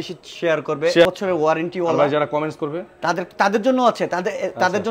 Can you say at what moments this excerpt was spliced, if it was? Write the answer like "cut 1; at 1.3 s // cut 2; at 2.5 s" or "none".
cut 1; at 1.1 s